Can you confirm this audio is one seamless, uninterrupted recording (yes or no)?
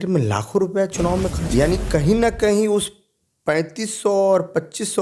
no